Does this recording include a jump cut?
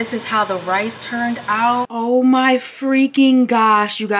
yes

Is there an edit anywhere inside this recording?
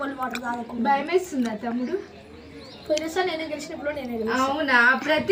no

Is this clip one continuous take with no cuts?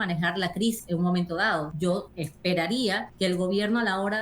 no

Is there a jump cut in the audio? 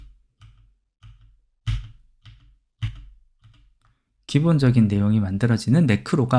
no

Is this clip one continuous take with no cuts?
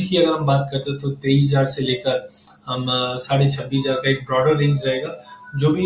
yes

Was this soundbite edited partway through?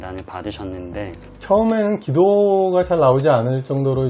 yes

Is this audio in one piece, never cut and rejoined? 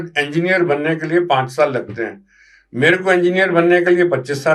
yes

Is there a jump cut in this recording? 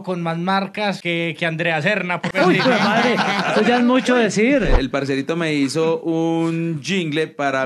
yes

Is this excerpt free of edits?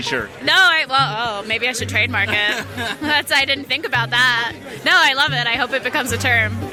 yes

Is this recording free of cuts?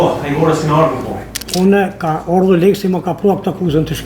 no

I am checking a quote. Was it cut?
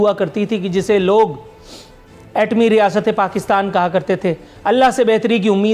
no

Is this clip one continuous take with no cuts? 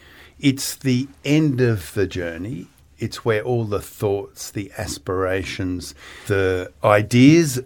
no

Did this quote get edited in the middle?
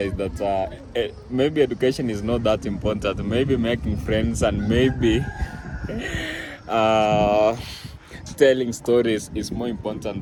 no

